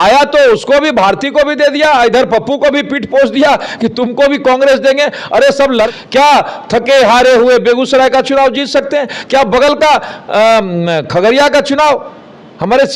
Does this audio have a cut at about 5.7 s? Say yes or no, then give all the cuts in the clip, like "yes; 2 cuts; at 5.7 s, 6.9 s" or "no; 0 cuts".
yes; 1 cut; at 5.7 s